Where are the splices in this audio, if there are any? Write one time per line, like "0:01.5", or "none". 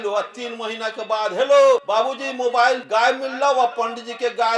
0:01.8
0:02.8